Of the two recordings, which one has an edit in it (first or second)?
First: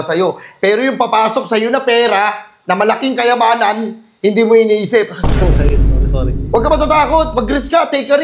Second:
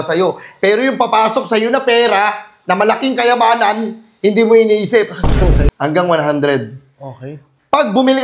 second